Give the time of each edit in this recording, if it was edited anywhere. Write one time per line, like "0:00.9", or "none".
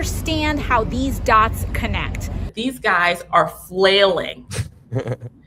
0:02.5